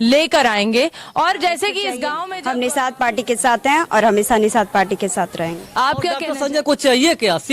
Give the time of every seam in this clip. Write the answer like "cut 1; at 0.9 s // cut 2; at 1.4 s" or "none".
cut 1; at 2.3 s // cut 2; at 6.2 s